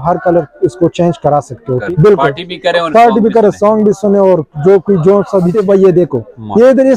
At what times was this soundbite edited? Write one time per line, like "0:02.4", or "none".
0:01.8
0:05.6